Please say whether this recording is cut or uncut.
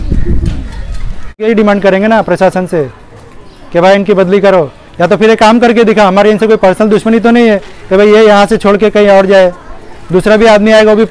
cut